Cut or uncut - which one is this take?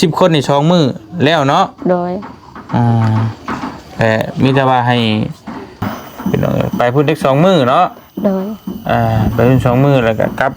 cut